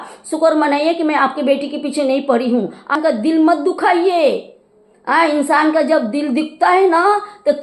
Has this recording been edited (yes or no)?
yes